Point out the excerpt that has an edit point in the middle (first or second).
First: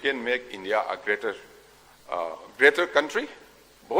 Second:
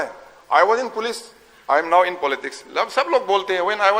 first